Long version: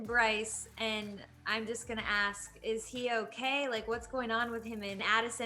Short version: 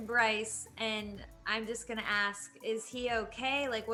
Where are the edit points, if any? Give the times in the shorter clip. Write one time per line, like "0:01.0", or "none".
none